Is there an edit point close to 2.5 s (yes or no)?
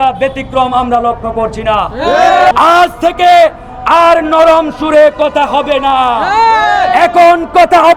yes